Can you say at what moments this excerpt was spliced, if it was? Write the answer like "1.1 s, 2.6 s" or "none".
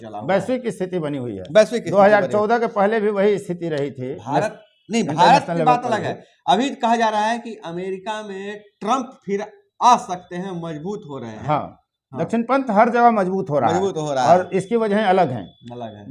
none

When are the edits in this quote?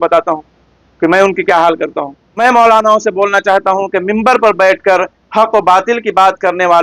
2.2 s

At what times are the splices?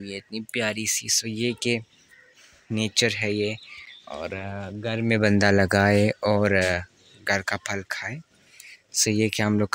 none

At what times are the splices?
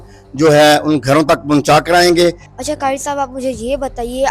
2.5 s

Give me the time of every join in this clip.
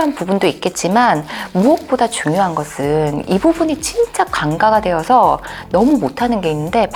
none

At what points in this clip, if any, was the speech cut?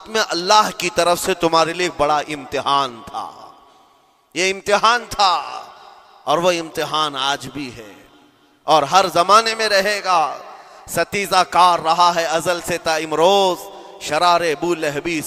none

